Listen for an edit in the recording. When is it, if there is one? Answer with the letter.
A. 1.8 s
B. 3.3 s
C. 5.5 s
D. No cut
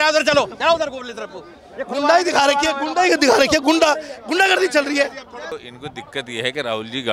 C